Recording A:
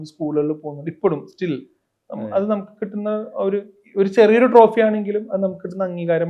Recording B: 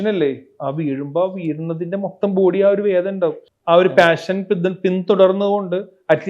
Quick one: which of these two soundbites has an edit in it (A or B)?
B